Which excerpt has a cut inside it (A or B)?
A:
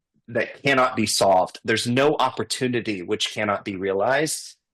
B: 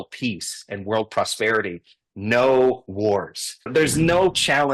B